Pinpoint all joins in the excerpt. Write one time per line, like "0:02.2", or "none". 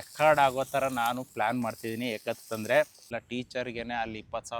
0:03.0